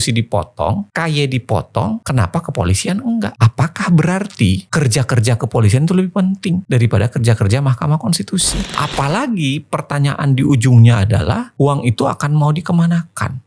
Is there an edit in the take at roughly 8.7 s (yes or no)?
yes